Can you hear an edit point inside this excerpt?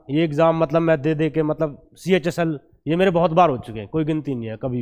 no; 0 cuts

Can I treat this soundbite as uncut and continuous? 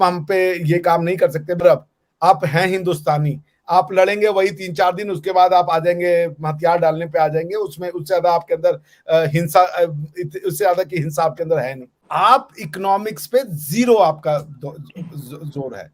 no; 2 cuts; at 1.6 s, 12.0 s

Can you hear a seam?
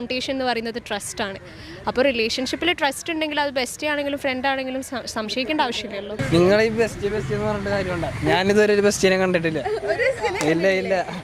yes; 1 cut; at 6.1 s

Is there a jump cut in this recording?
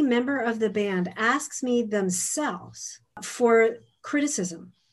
yes; 1 cut; at 3.3 s

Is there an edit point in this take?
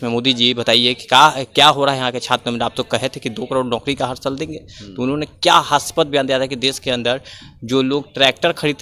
no; 0 cuts

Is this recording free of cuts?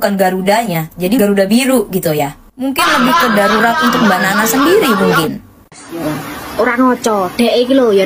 no; 2 cuts; at 1.2 s, 5.8 s

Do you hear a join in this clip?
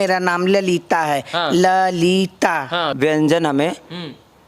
yes; 1 cut; at 2.9 s

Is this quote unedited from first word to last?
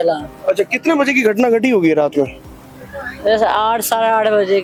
yes; 0 cuts

